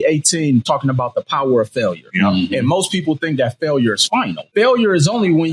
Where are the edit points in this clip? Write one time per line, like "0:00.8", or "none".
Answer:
0:04.4